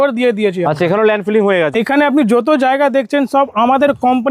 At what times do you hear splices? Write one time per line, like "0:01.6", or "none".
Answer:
0:01.7